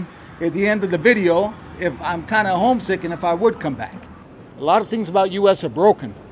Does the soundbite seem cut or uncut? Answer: cut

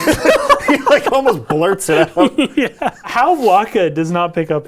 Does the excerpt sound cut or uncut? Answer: cut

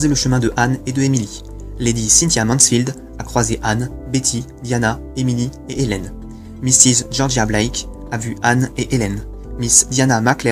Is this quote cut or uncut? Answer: uncut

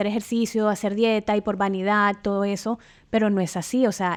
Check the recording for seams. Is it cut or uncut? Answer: uncut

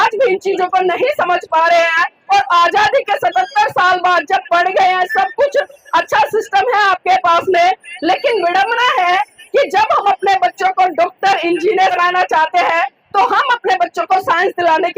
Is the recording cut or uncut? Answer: cut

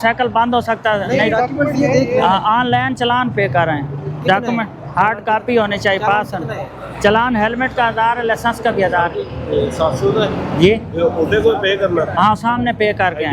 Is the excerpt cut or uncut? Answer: uncut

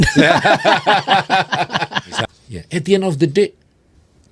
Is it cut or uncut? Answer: cut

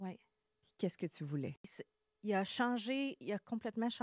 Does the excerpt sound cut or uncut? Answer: cut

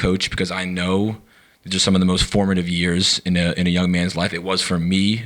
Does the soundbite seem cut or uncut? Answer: uncut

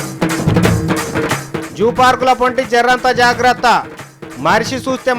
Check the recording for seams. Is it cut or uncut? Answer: uncut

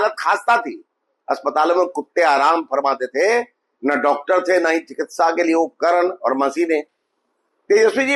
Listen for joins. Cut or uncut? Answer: uncut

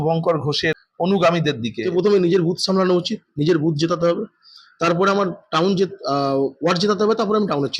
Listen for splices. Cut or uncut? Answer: cut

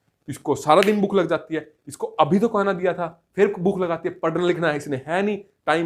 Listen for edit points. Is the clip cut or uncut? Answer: uncut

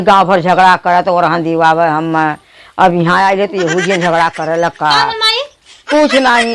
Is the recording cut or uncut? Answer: uncut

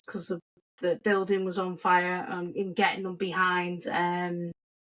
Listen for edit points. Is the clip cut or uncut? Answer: uncut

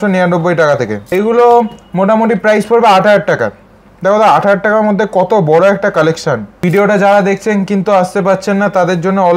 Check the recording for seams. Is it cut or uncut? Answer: cut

